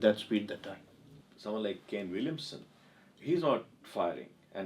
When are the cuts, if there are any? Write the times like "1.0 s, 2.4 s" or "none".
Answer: 1.1 s